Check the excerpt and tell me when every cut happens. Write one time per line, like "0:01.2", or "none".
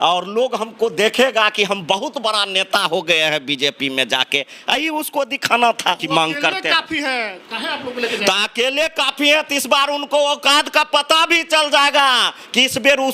0:06.0